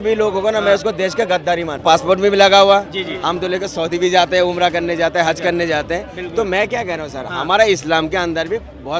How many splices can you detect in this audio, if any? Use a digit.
1